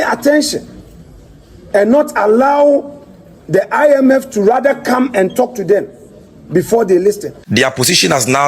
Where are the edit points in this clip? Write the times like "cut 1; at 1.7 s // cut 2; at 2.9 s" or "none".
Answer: cut 1; at 7.3 s